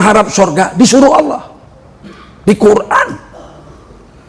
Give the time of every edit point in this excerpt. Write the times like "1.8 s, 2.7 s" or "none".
none